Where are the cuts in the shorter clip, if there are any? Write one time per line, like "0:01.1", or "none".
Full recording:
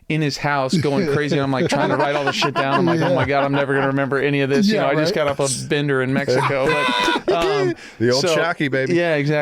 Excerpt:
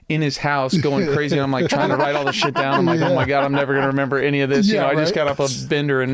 none

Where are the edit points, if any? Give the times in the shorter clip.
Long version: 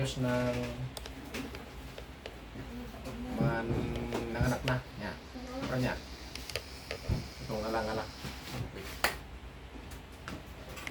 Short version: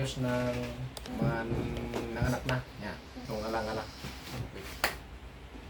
0:01.0
0:03.2

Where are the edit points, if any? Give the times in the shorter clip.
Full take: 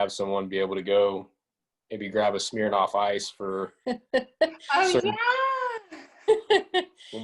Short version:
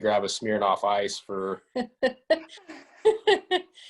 0:02.5

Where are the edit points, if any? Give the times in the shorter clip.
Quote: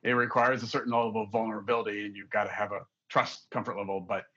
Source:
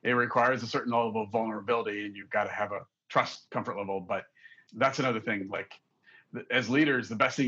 none

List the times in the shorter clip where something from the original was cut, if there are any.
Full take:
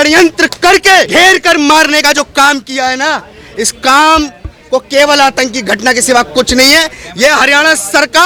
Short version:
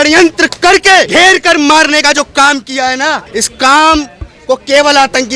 0:03.2

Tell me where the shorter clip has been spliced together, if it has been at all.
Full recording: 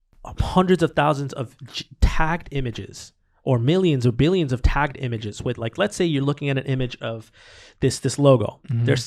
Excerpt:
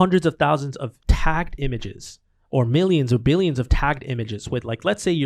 0:01.0

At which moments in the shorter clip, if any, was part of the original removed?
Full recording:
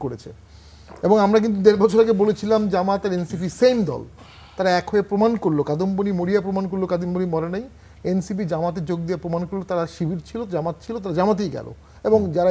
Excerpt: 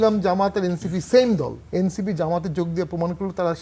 0:01.6

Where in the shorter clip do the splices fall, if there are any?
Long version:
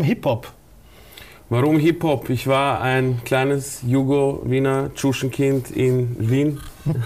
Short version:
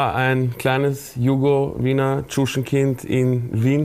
none

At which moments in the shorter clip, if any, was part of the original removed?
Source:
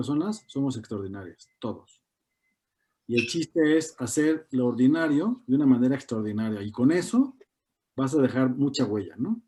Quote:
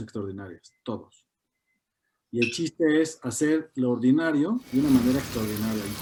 none

